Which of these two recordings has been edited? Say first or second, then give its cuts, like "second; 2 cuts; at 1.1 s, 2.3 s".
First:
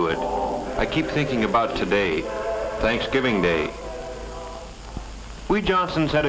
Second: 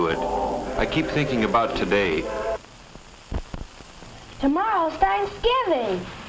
first; 1 cut; at 2.6 s